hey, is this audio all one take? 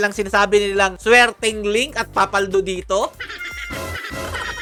yes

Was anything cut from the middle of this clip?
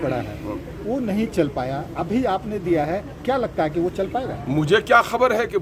no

